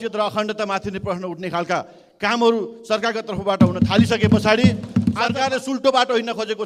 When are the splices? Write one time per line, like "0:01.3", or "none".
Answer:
0:05.2

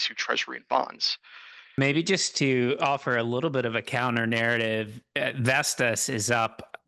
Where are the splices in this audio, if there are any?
0:01.8

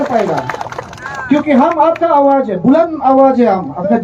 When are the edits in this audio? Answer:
none

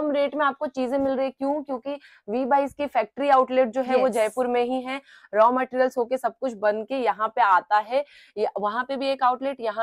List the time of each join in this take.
none

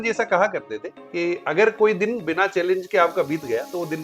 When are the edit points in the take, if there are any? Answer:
none

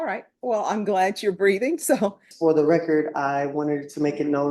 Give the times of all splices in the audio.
0:02.3

